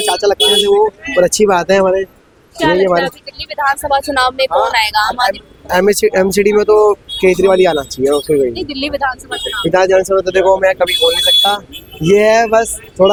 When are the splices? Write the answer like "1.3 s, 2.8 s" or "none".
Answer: none